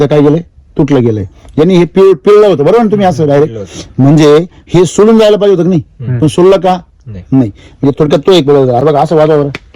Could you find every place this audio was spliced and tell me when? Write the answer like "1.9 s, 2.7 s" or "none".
8.8 s